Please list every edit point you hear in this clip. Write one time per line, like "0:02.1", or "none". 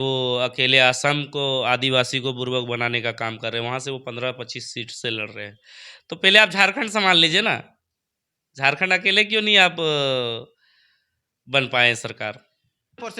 none